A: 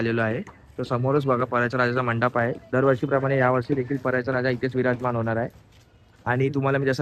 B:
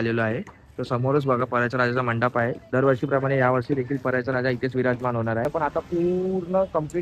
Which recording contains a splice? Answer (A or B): B